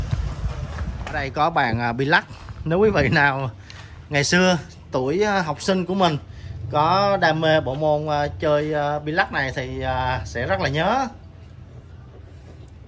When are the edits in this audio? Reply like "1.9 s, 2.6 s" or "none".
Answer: 1.2 s